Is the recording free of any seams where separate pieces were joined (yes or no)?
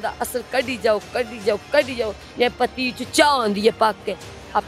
yes